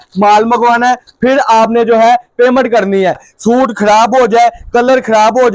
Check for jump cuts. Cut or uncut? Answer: cut